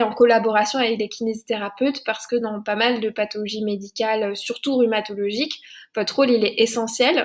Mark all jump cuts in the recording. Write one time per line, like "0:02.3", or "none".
none